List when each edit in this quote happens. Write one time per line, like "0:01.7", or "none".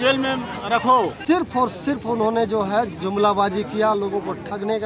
0:01.2